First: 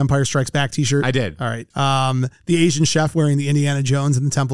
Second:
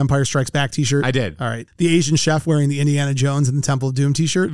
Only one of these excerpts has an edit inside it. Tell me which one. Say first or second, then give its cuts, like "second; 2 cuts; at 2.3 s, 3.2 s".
second; 1 cut; at 1.7 s